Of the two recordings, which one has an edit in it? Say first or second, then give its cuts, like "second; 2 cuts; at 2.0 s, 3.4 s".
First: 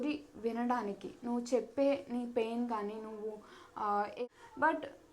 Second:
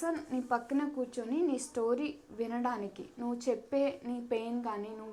first; 1 cut; at 4.2 s